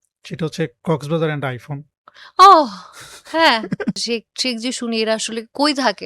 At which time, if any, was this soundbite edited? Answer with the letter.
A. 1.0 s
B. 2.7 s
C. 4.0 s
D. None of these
C